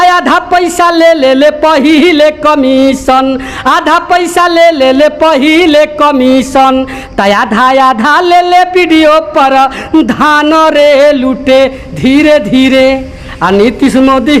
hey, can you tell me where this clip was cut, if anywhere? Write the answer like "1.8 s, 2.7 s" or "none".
none